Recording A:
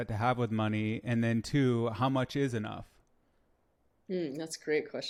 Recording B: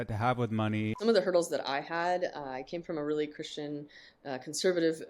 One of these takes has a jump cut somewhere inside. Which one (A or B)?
B